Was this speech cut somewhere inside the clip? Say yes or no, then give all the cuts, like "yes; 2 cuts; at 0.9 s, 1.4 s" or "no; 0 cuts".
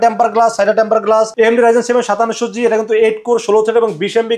yes; 1 cut; at 1.3 s